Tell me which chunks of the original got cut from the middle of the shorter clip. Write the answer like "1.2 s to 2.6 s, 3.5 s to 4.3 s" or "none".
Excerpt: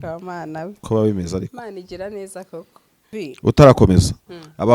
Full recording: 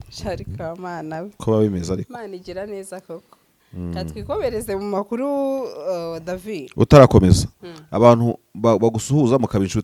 3.7 s to 6.4 s

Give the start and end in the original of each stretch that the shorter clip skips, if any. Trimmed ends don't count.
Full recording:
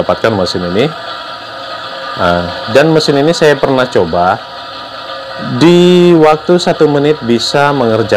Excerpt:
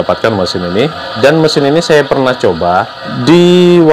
1.1 s to 2.6 s, 4.6 s to 5.4 s

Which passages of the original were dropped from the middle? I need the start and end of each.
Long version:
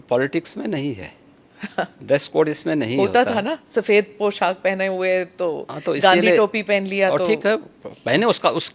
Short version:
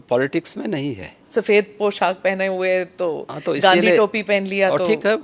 1.2 s to 3.6 s

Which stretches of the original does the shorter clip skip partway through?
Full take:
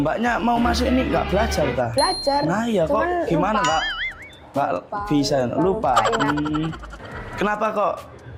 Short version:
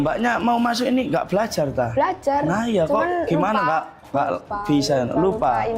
4.0 s to 4.4 s

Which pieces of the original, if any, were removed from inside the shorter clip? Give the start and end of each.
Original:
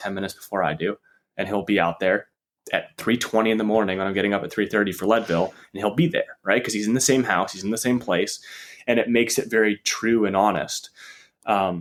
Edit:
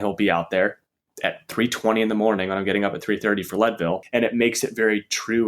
5.5 s to 8.8 s

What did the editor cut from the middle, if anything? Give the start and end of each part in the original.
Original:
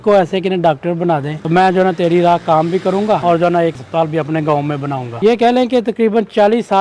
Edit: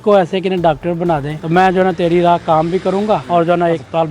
none

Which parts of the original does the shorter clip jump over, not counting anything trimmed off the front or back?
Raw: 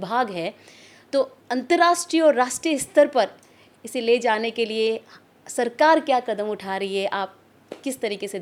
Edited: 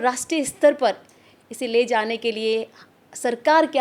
none

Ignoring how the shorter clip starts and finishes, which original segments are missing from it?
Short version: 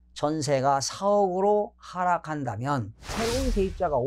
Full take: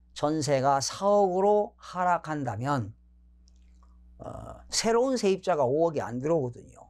3.0 s to 4.7 s

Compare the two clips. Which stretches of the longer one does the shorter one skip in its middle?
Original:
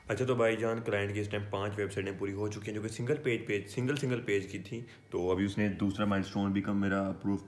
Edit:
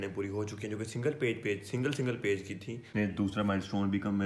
4.9 s to 5.5 s

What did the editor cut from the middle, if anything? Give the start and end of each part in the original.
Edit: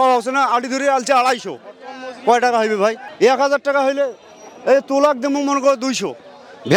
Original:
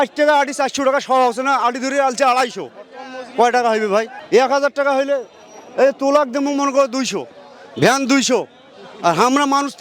none

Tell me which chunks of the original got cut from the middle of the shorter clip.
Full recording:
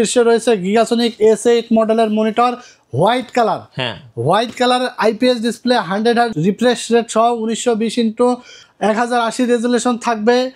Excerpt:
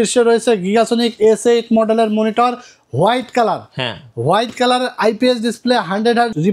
none

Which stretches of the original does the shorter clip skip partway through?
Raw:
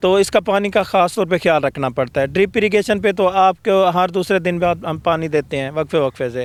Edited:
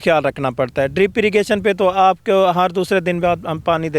none

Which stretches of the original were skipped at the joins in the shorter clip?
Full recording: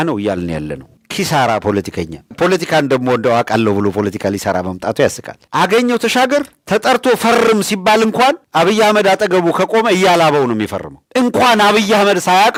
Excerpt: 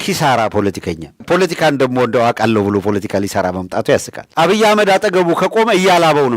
5.4 s to 8.4 s

